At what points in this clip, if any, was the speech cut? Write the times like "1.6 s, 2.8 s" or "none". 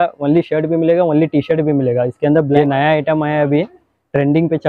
2.6 s